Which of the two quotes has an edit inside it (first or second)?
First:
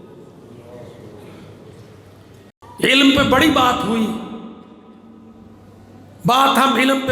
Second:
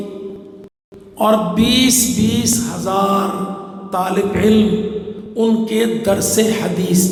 first